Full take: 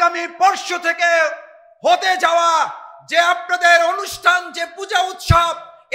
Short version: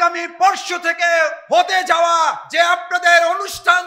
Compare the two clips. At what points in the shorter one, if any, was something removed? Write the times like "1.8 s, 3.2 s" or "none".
1.4 s, 2.4 s